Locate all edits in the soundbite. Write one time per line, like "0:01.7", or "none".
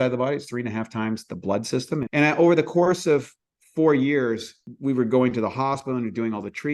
0:02.1
0:04.7